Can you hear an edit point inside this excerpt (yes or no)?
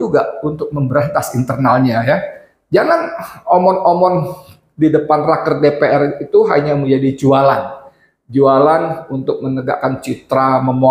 no